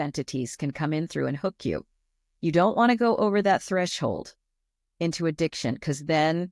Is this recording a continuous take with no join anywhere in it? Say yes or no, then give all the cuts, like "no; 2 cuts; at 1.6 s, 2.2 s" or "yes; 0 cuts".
yes; 0 cuts